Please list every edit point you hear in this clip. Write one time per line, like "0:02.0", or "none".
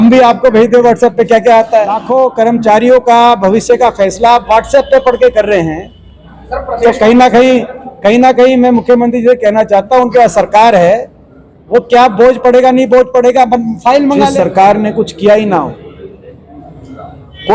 0:02.0
0:14.3